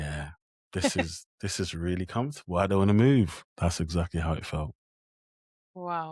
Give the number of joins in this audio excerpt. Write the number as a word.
zero